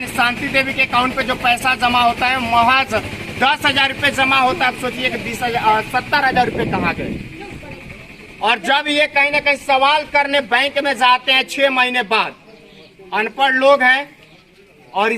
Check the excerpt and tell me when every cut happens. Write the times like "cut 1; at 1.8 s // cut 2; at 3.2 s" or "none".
none